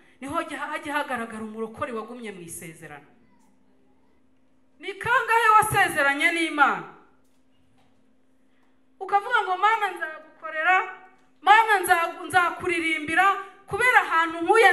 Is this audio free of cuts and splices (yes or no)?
no